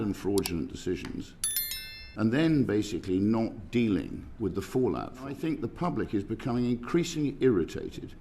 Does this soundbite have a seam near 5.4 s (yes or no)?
yes